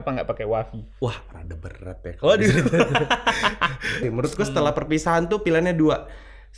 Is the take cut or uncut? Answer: cut